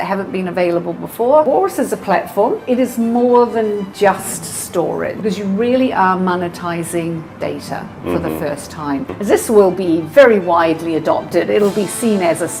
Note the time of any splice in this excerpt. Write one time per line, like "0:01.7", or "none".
0:01.4
0:02.6
0:05.1
0:09.1